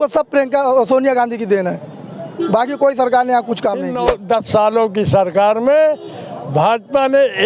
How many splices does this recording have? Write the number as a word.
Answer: one